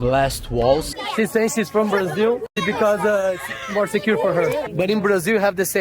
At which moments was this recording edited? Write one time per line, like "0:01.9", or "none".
0:01.0
0:04.7